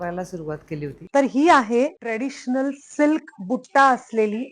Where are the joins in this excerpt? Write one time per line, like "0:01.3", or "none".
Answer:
0:01.0
0:02.0